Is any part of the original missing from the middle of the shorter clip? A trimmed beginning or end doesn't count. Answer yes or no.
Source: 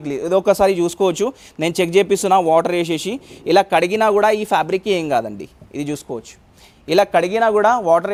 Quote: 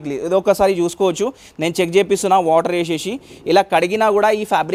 no